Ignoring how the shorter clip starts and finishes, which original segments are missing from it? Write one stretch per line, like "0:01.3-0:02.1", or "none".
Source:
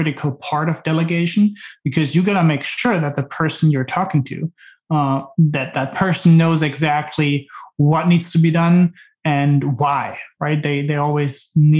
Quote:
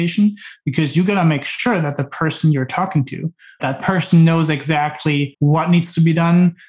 0:04.7-0:05.7
0:07.4-0:07.7